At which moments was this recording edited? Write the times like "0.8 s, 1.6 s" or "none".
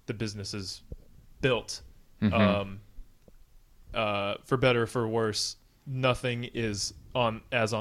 none